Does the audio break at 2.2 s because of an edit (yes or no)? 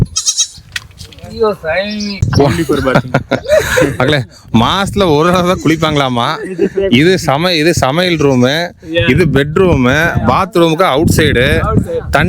yes